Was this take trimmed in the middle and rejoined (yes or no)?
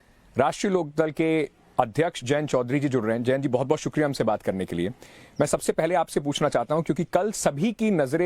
yes